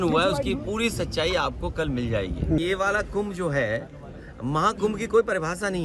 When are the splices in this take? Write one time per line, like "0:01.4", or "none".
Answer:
0:02.6